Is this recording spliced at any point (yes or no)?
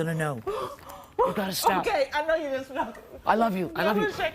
yes